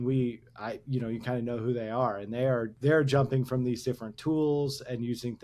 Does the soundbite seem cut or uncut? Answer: cut